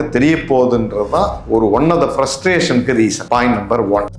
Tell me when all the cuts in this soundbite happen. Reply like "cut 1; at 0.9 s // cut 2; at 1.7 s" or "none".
cut 1; at 3.2 s